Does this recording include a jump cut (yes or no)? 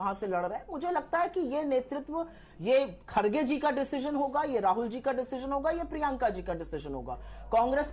no